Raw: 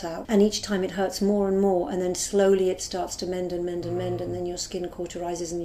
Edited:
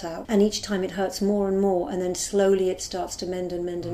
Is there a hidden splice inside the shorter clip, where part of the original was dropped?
no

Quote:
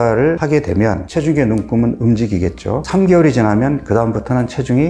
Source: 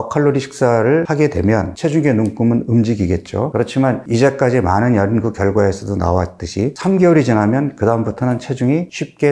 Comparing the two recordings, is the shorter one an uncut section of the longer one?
no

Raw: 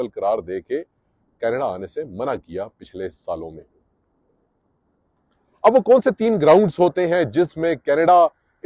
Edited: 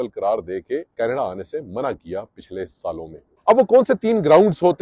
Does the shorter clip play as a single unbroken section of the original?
no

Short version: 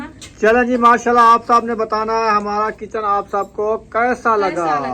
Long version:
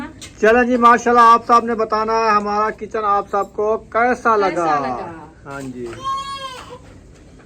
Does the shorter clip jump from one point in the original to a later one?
no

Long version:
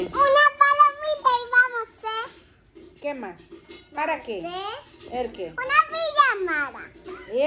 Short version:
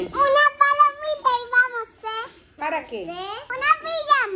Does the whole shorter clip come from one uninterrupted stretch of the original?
no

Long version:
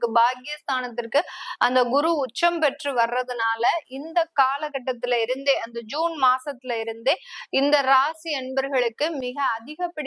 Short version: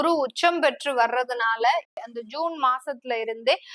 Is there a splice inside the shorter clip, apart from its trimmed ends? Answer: yes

